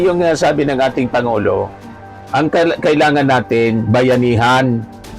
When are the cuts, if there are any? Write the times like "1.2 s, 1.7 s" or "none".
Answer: none